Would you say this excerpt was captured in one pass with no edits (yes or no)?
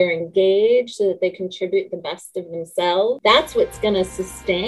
no